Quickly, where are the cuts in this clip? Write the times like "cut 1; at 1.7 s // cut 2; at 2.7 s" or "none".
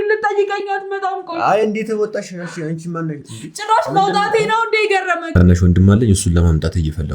cut 1; at 5.3 s